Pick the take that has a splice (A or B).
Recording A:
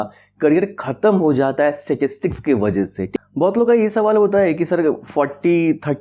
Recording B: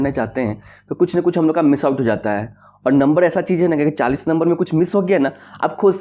A